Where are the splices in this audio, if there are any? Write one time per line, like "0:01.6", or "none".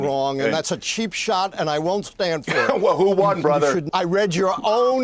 0:03.9